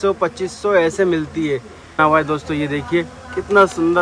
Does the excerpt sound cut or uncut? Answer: cut